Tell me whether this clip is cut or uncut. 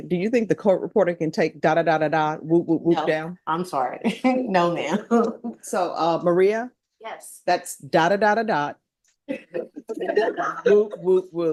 uncut